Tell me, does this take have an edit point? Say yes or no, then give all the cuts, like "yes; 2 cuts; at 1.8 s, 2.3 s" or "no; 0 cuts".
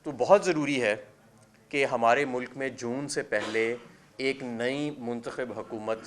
no; 0 cuts